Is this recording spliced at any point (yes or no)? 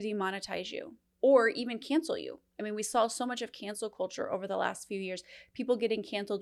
yes